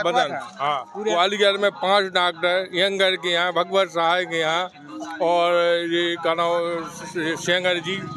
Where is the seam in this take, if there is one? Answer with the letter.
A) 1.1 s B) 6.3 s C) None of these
A